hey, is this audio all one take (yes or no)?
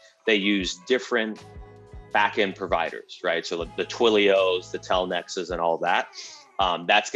yes